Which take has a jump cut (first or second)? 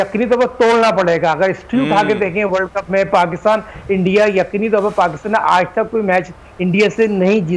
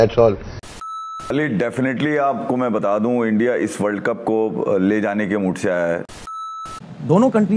second